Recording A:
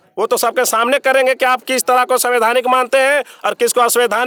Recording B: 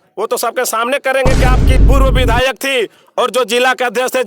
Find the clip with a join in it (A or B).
B